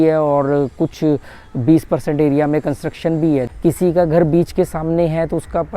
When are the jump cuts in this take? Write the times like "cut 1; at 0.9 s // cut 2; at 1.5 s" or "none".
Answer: cut 1; at 3.5 s